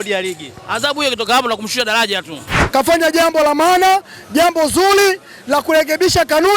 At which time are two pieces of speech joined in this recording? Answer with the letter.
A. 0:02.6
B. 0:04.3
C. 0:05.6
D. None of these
A